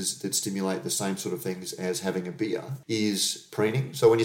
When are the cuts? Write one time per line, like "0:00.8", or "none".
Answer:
0:02.7